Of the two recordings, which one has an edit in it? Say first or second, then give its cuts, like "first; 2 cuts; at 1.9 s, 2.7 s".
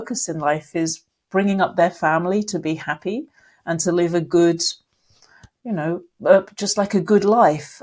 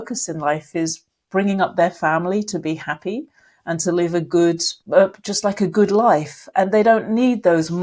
second; 1 cut; at 4.7 s